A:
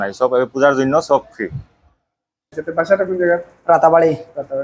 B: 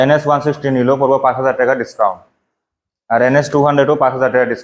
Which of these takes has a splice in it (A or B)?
A